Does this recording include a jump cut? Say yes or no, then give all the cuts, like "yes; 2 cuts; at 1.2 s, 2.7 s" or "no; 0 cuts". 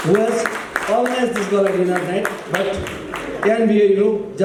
no; 0 cuts